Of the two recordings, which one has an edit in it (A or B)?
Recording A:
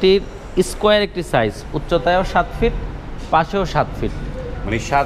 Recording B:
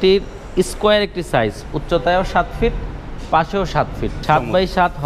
B